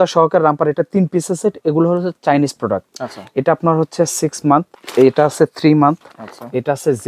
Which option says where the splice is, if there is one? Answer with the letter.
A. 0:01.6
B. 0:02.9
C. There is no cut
C